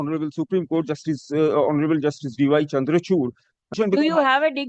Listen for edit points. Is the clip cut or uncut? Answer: cut